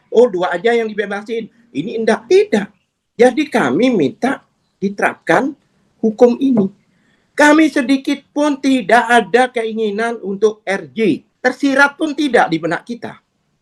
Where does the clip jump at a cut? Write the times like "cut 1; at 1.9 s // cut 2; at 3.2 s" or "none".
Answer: cut 1; at 2.2 s // cut 2; at 11.3 s

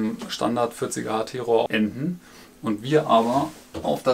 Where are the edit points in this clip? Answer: cut 1; at 1.7 s

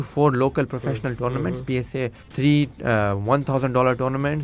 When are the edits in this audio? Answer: cut 1; at 2.2 s

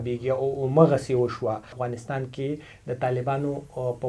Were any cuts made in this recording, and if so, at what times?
cut 1; at 1.8 s

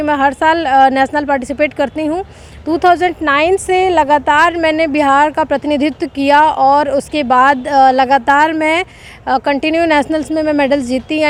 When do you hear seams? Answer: none

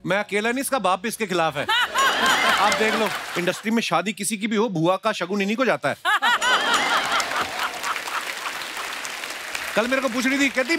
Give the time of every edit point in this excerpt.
cut 1; at 3.2 s

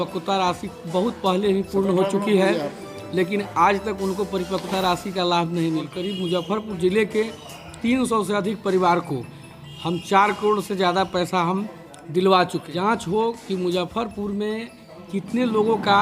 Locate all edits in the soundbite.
cut 1; at 5.9 s // cut 2; at 12.6 s

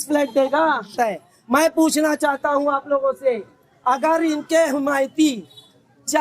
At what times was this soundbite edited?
cut 1; at 0.9 s

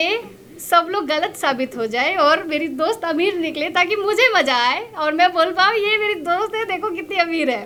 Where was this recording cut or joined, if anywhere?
none

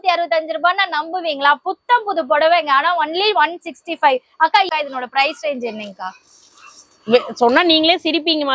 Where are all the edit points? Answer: cut 1; at 4.7 s

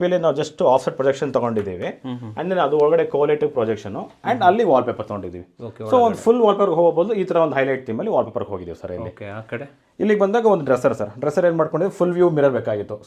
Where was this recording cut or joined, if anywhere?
none

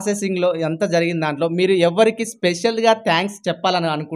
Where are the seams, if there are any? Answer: none

